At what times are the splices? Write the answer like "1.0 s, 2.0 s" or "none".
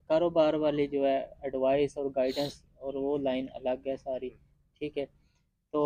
none